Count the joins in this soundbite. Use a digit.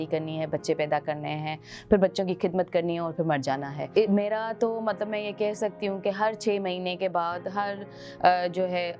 1